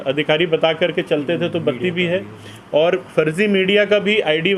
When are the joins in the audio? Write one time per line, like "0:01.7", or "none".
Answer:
none